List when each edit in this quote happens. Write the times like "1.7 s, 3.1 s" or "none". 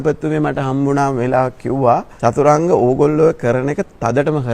2.1 s